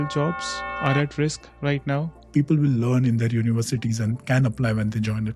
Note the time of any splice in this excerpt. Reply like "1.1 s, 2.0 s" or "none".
2.2 s